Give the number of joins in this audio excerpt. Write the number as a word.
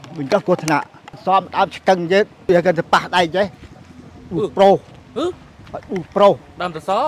two